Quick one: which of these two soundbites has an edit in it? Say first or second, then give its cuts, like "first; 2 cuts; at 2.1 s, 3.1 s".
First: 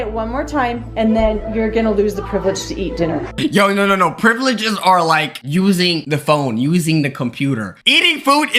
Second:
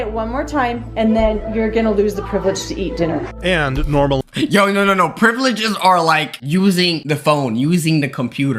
first; 2 cuts; at 3.3 s, 7.7 s